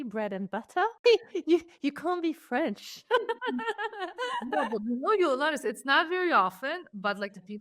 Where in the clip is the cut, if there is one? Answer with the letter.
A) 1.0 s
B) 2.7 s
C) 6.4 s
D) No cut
A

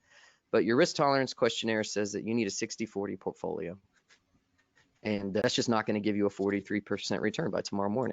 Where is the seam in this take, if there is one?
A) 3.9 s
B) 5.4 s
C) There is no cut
B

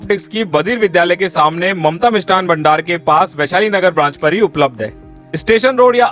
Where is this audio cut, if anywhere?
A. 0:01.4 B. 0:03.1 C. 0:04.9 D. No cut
D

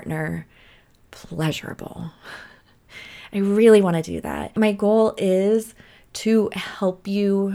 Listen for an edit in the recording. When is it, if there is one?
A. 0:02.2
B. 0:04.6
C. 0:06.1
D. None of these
B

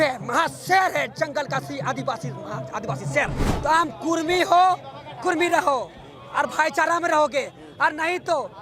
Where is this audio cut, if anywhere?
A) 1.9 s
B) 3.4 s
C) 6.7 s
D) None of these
B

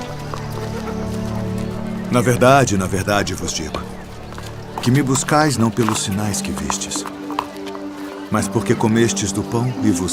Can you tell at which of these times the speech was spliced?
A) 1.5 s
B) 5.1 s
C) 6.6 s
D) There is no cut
D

